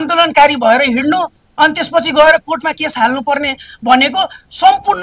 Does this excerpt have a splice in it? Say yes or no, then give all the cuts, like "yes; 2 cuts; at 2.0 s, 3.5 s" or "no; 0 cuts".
no; 0 cuts